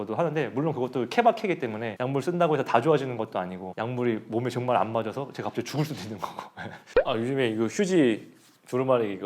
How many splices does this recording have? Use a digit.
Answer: 1